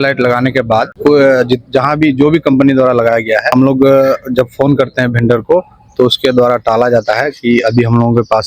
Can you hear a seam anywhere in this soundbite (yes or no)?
yes